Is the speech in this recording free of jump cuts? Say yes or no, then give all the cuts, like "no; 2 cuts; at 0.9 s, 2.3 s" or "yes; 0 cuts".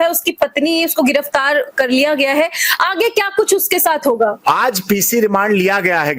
yes; 0 cuts